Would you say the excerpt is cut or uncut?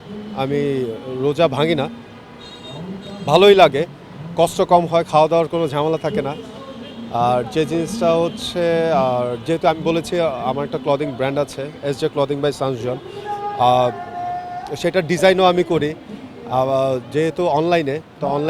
uncut